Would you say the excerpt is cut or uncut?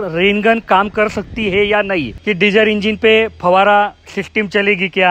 cut